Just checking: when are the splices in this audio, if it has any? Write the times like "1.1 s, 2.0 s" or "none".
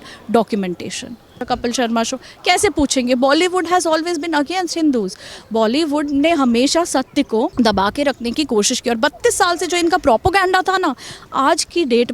1.4 s